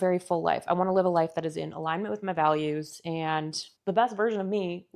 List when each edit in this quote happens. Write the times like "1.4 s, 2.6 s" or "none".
none

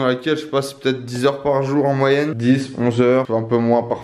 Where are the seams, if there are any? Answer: 2.3 s, 3.3 s

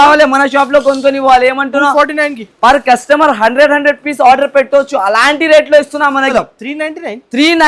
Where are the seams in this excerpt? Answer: 6.3 s

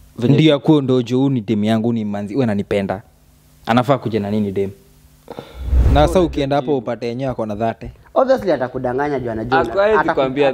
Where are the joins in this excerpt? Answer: 5.8 s

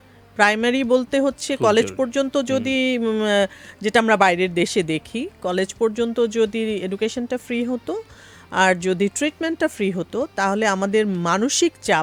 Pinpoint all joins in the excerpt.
none

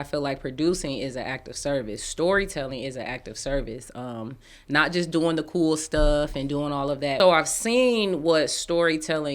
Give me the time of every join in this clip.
7.1 s

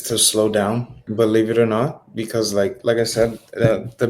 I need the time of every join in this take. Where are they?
1.0 s

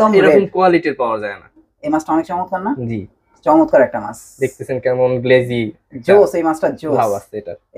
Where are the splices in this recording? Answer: 1.7 s

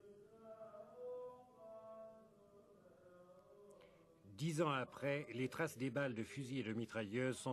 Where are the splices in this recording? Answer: 3.6 s

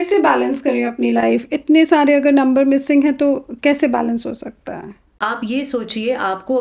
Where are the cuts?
5.2 s

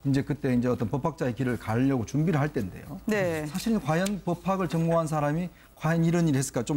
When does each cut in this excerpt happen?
5.7 s

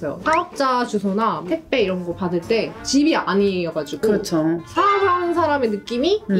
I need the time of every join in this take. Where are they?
none

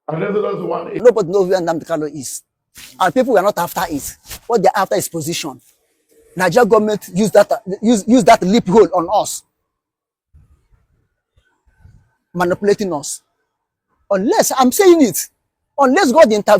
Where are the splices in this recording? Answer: 1.0 s

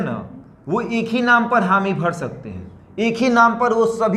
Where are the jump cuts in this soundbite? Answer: none

